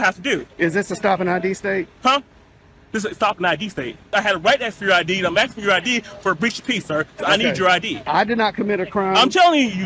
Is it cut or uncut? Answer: cut